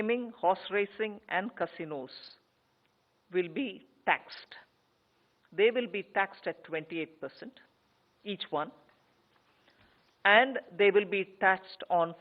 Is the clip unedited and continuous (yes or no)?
no